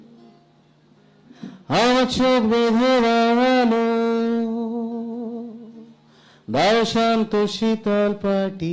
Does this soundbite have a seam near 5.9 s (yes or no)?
no